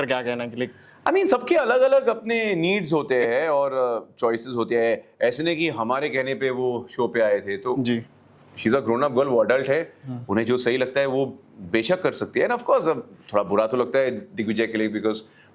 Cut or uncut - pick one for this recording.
uncut